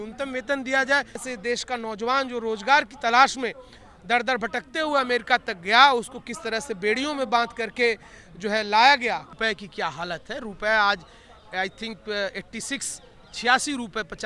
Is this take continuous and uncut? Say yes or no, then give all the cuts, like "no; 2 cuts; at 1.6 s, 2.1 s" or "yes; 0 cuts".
no; 2 cuts; at 1.3 s, 9.3 s